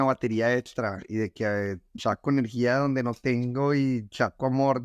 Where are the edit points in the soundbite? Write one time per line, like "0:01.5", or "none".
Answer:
none